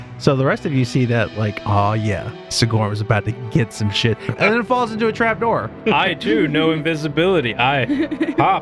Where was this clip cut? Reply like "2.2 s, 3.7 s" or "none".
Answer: 4.3 s, 5.8 s